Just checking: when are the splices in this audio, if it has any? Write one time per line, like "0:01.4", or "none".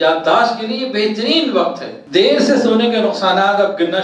0:01.9